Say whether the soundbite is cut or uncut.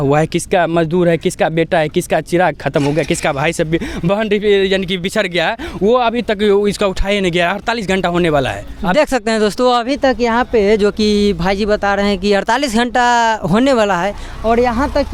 uncut